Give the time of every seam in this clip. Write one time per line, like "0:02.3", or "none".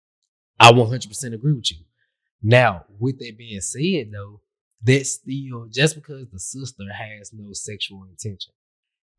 none